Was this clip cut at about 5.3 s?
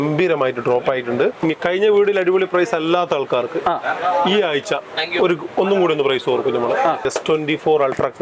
no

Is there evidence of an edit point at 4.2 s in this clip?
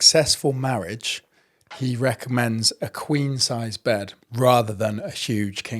yes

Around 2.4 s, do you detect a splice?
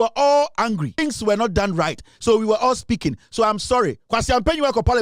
no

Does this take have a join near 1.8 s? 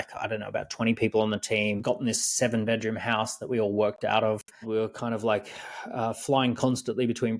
yes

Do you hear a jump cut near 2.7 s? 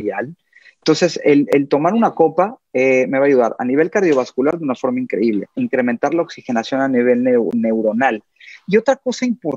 no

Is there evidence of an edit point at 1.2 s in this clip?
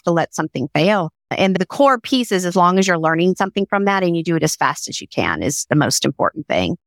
yes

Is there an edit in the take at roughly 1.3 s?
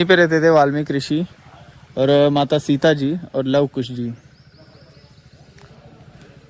no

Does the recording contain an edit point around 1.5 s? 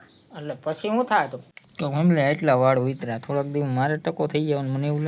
yes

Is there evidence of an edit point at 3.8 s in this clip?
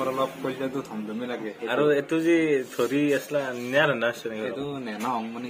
no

